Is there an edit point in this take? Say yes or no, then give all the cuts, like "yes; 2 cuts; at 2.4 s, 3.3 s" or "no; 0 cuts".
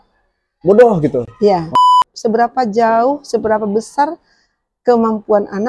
yes; 1 cut; at 1.7 s